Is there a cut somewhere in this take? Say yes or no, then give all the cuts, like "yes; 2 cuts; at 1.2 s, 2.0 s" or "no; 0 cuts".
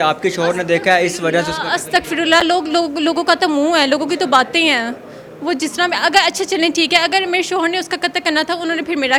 no; 0 cuts